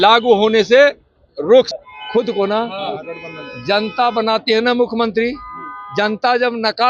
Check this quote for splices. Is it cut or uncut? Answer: cut